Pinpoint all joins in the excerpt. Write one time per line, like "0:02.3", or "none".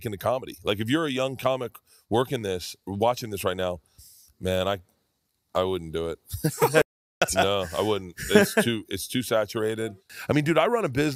0:10.0